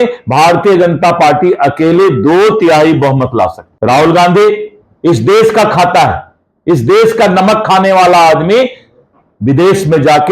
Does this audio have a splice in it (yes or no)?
yes